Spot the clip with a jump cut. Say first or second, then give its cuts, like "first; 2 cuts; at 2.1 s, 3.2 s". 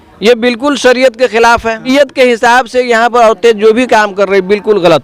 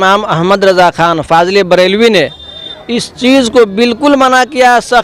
first; 1 cut; at 1.9 s